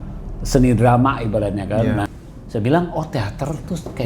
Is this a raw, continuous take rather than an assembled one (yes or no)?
no